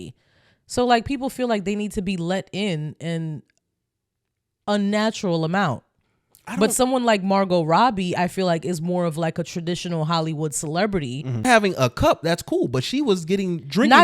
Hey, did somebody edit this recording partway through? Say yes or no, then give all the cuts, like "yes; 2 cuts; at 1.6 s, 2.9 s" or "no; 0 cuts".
yes; 1 cut; at 11.5 s